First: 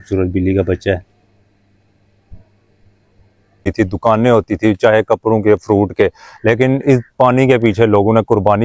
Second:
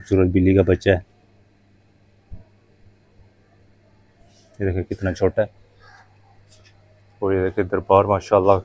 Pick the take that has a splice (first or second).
first